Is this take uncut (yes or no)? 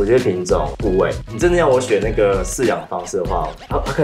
no